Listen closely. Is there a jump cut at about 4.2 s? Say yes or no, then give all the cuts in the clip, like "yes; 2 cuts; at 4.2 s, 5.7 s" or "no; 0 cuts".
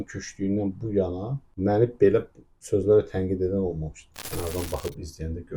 yes; 1 cut; at 4.2 s